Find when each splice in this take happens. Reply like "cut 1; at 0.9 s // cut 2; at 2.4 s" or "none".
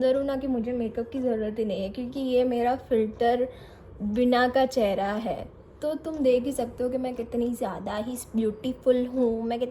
none